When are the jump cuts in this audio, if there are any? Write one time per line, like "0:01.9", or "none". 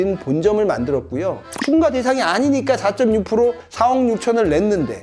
0:01.4